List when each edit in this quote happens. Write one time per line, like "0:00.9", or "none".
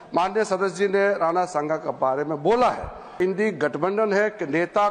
0:03.2